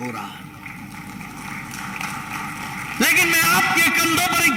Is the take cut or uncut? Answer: uncut